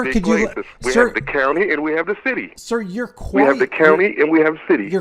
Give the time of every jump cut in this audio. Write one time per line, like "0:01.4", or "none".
none